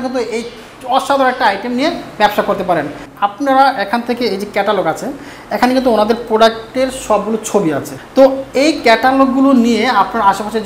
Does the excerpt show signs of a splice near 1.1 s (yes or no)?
no